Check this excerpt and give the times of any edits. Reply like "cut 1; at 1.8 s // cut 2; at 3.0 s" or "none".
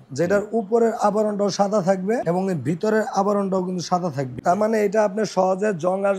cut 1; at 2.2 s // cut 2; at 4.4 s